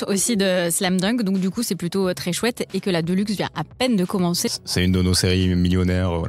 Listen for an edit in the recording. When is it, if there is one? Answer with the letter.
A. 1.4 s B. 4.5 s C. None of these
B